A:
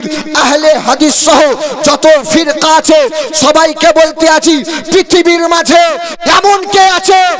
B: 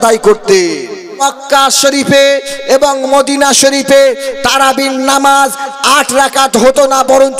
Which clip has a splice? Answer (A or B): B